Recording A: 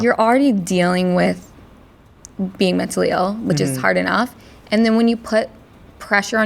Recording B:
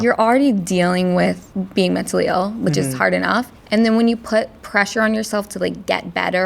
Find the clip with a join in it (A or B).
B